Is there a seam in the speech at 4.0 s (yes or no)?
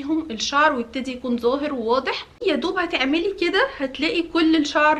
no